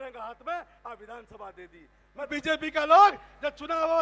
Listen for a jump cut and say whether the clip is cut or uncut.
cut